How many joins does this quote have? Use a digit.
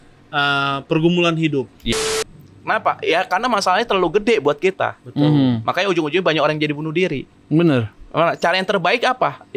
1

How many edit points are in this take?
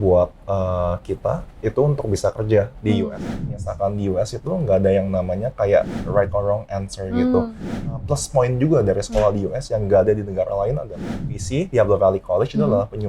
3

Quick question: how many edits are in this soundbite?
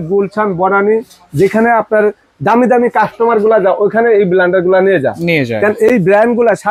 0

